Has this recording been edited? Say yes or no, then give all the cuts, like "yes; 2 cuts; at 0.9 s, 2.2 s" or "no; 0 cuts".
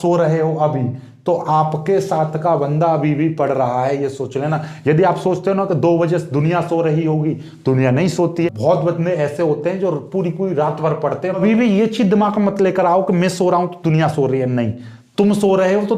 yes; 2 cuts; at 8.5 s, 11.4 s